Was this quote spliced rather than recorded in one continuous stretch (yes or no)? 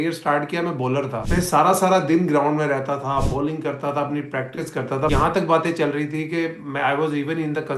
yes